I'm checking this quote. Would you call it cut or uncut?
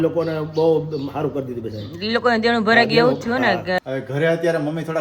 cut